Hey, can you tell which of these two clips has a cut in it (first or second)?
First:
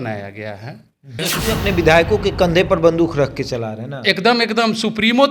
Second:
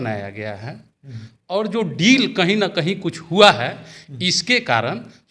first